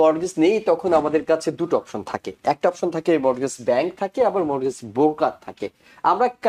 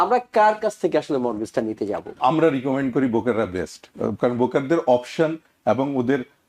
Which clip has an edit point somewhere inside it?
second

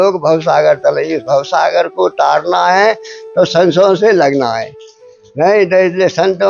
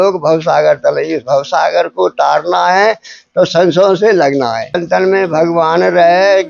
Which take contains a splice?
second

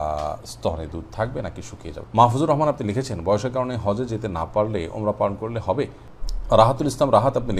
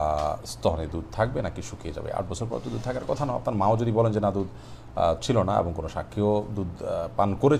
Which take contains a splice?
first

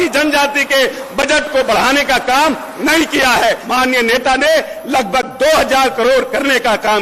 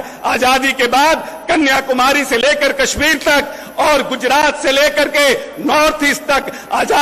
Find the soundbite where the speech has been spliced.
first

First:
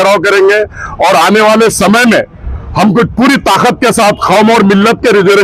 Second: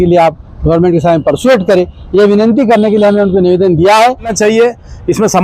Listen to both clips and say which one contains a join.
second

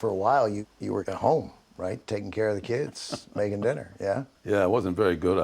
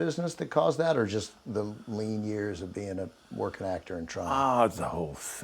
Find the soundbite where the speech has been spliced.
first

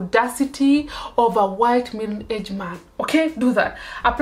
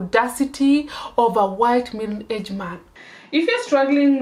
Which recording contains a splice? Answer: second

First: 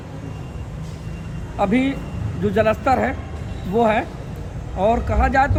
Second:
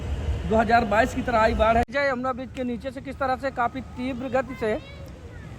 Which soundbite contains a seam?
second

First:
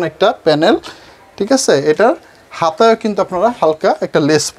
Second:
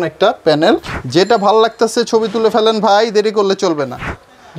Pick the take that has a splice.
second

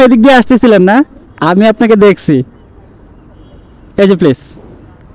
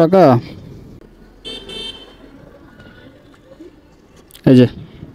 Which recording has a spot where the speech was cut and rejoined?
second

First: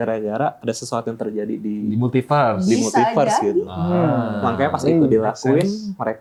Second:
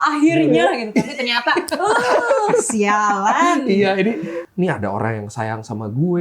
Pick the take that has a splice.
second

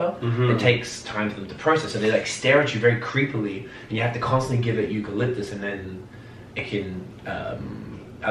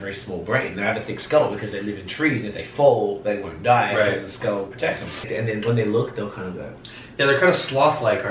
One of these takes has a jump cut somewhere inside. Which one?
second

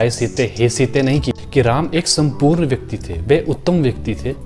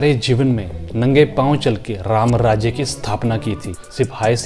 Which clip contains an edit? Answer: first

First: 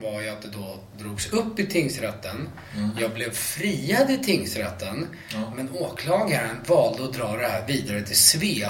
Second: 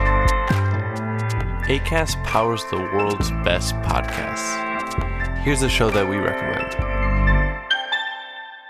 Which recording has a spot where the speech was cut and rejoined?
second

